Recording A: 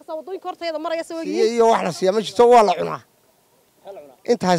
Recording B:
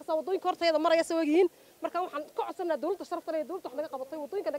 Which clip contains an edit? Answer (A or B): A